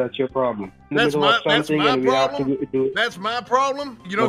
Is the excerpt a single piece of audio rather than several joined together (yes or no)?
yes